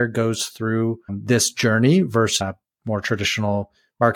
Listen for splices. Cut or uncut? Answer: cut